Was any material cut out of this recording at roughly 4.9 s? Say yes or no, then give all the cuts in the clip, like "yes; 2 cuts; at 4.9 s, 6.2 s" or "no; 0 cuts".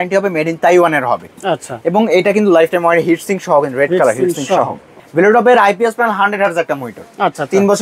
yes; 1 cut; at 4.9 s